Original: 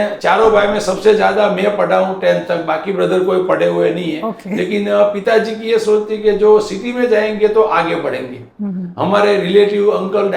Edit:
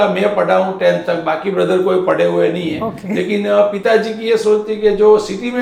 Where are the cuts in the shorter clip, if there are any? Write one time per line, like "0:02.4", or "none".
none